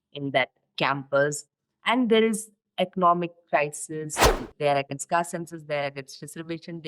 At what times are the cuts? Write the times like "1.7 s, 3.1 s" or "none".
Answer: 4.4 s